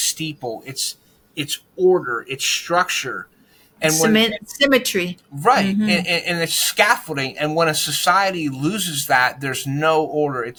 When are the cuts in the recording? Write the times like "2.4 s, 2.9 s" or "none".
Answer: none